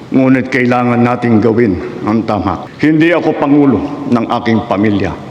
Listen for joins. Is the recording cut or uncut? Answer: cut